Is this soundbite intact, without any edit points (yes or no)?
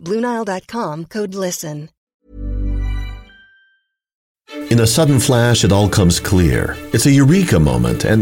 no